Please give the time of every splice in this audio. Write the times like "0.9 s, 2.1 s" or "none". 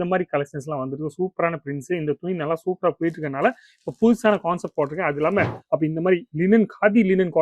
5.6 s